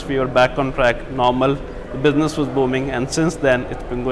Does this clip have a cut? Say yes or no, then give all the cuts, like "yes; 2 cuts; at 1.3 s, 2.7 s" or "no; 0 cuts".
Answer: no; 0 cuts